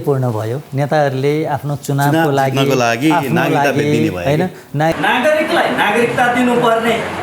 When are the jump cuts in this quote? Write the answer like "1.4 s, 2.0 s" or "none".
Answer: 4.9 s